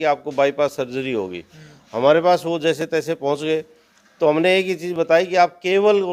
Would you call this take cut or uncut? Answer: uncut